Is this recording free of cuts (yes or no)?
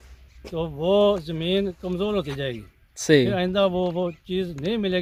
yes